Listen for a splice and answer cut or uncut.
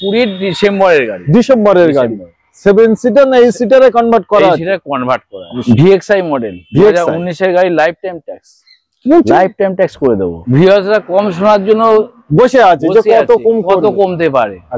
cut